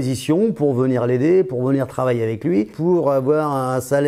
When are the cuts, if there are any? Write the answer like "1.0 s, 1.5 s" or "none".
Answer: 2.7 s

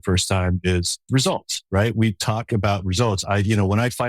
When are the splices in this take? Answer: 1.1 s

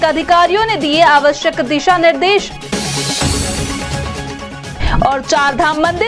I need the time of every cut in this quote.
none

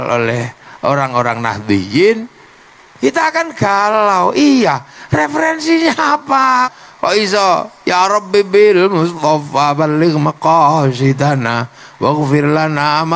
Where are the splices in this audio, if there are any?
6.7 s

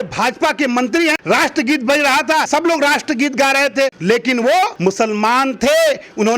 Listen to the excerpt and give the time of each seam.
1.2 s, 2.5 s, 4.0 s, 4.7 s

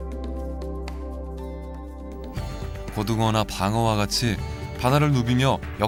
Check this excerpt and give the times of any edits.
none

